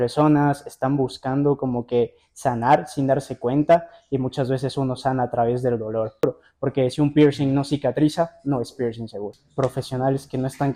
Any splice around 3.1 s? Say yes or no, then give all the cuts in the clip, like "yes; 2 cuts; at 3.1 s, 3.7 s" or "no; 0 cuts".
no; 2 cuts; at 6.2 s, 9.4 s